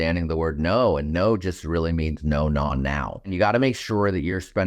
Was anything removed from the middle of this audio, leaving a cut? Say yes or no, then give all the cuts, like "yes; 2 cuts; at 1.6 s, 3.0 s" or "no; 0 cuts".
yes; 1 cut; at 3.3 s